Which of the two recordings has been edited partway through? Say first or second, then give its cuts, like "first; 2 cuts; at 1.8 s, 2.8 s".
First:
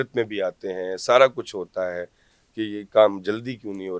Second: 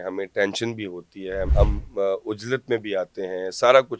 second; 1 cut; at 1.5 s